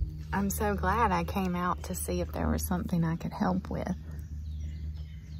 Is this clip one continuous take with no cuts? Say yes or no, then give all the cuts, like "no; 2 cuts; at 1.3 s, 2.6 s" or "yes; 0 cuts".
yes; 0 cuts